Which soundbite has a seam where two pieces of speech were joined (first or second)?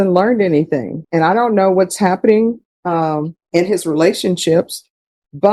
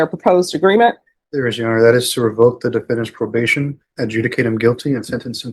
first